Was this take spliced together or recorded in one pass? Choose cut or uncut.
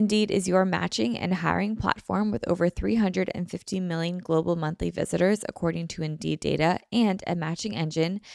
uncut